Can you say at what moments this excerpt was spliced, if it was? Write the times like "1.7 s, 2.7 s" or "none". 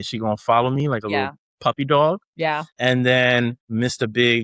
2.4 s, 3.6 s